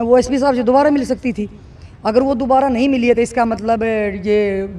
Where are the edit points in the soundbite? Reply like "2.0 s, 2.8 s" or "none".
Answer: none